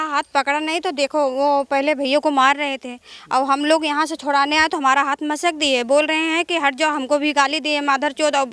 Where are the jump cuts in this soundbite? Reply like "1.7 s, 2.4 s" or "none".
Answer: none